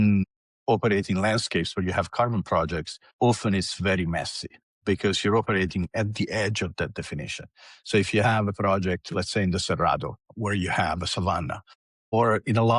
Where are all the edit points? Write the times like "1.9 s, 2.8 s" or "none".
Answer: none